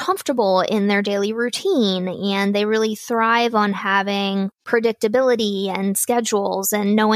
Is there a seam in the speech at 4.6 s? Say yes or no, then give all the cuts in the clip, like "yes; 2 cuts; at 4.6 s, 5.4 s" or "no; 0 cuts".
yes; 1 cut; at 4.6 s